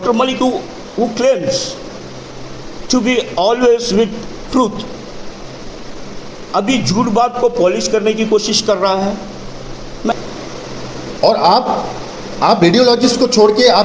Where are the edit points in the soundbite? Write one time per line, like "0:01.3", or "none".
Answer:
0:10.1